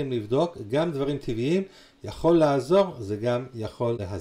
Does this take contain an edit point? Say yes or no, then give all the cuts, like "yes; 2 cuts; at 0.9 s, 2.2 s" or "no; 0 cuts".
no; 0 cuts